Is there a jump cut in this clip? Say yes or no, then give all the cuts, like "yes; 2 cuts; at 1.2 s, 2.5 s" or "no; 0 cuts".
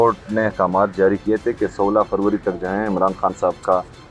no; 0 cuts